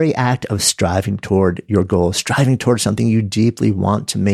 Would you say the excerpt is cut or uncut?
uncut